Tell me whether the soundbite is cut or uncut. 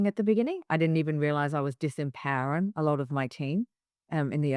uncut